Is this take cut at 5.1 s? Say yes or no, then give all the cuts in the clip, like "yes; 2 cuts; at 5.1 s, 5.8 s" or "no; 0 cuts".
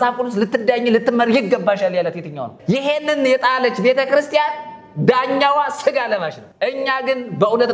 no; 2 cuts; at 2.5 s, 6.4 s